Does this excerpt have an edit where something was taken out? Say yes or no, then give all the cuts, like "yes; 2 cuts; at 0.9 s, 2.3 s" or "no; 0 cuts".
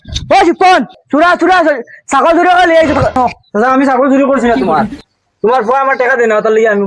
yes; 2 cuts; at 1.0 s, 3.2 s